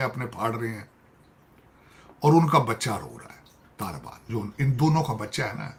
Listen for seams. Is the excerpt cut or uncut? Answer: uncut